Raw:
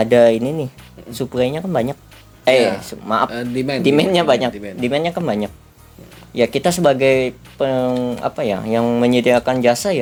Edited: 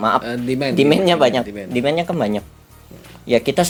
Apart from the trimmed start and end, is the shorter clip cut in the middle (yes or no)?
no